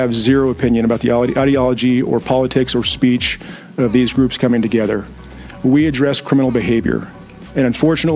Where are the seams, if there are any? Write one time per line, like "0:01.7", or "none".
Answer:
none